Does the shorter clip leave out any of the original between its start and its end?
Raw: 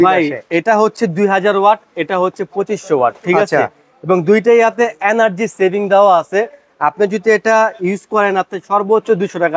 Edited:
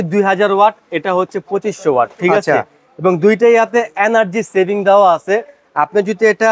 no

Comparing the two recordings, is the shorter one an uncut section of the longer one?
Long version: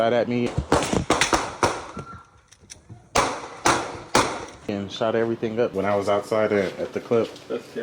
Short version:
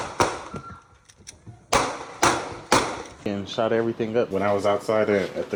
yes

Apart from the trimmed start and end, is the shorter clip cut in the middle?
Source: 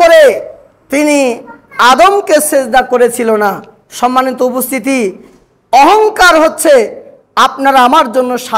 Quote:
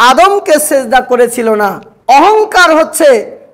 yes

